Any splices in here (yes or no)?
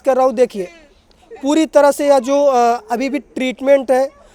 no